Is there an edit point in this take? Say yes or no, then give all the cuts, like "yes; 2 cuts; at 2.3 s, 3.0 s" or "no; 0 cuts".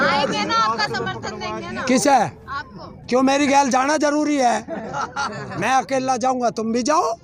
no; 0 cuts